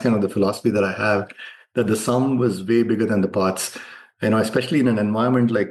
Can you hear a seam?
no; 0 cuts

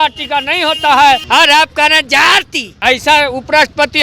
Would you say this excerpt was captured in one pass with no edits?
no; 2 cuts; at 1.2 s, 2.6 s

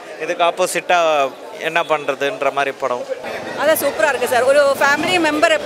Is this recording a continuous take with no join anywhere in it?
no; 1 cut; at 3.3 s

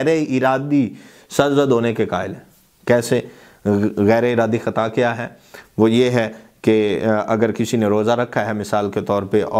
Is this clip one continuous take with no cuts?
yes; 0 cuts

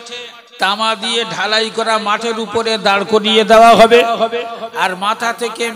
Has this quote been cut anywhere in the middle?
no; 0 cuts

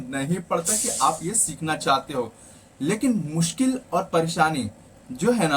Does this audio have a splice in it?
no; 0 cuts

